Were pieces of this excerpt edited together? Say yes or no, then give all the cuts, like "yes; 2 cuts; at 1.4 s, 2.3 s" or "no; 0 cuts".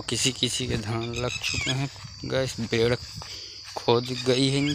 no; 0 cuts